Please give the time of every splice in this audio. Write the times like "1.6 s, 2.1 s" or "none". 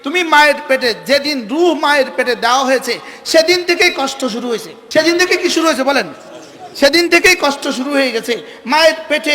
4.8 s